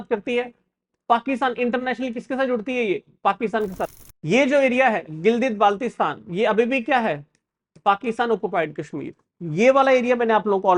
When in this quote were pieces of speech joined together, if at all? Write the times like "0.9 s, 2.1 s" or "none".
3.9 s